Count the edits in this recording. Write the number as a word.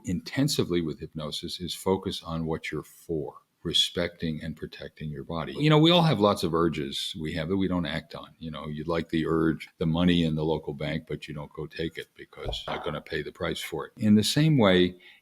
five